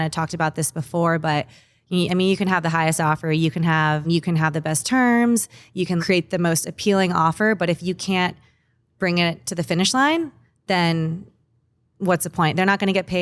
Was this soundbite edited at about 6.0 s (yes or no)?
yes